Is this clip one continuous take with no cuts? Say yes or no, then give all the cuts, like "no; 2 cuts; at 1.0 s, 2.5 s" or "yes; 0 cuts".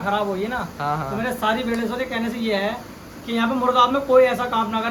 yes; 0 cuts